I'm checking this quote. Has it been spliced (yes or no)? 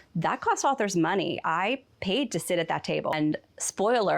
yes